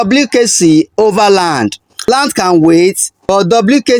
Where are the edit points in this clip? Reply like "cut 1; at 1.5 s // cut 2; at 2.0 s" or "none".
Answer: cut 1; at 2.1 s